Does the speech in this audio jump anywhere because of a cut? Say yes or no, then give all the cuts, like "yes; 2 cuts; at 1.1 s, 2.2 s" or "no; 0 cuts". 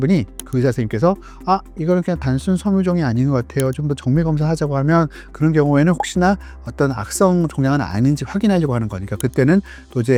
no; 0 cuts